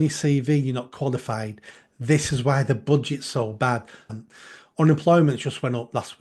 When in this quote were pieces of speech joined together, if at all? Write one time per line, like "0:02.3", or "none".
0:04.0